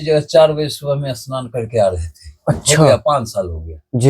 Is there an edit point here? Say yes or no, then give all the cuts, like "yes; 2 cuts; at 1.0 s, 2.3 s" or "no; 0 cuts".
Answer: no; 0 cuts